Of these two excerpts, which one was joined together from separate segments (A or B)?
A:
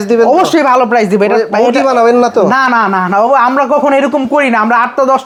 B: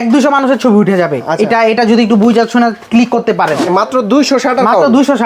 B